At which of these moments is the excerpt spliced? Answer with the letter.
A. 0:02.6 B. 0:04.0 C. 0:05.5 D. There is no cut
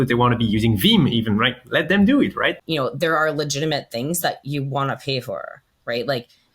A